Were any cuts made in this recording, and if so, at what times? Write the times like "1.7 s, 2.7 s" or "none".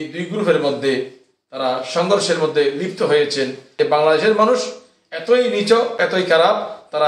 3.7 s, 6.0 s